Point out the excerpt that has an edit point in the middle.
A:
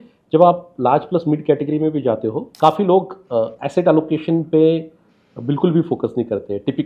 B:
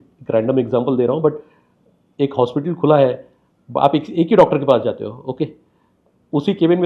A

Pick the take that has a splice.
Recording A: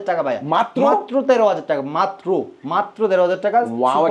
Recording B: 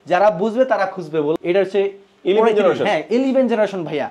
B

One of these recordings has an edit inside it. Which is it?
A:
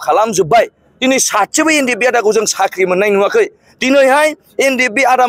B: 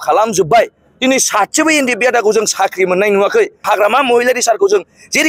B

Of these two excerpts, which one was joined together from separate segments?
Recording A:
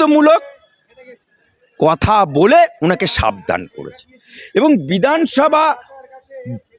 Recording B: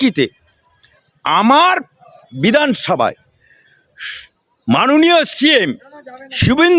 A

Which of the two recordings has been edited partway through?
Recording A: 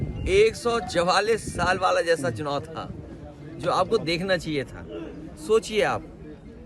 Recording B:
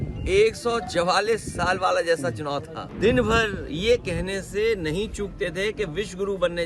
B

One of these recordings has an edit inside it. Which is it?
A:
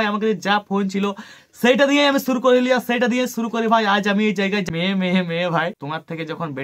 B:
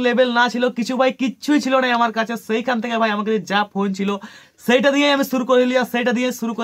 A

